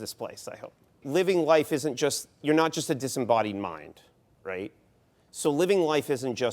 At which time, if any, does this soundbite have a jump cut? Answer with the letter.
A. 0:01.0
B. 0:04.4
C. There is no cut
A